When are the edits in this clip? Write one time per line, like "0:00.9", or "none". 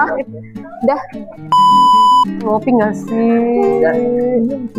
0:01.4
0:02.4